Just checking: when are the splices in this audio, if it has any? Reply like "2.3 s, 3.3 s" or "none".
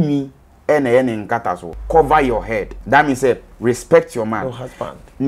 1.8 s, 2.7 s